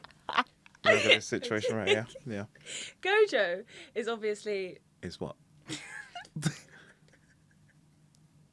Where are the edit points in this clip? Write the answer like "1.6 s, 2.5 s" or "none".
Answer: 4.9 s